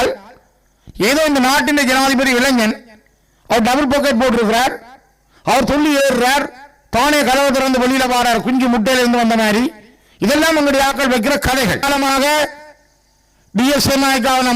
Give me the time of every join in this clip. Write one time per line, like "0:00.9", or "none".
0:11.8